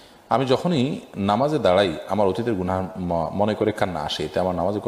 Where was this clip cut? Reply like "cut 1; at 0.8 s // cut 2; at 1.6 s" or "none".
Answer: none